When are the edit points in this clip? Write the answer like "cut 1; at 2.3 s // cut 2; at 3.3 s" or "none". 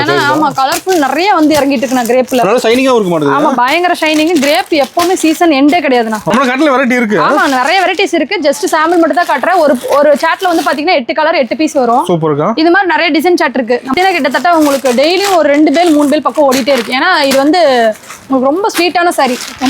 cut 1; at 6.3 s // cut 2; at 13.9 s